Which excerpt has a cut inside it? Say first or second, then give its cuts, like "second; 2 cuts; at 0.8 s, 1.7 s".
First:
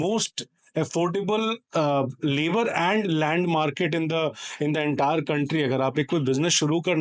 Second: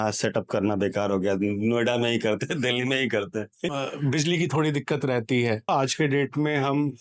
second; 2 cuts; at 3.7 s, 5.7 s